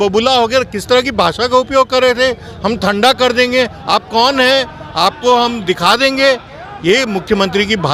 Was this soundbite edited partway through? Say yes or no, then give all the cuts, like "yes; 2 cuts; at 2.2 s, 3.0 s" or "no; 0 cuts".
no; 0 cuts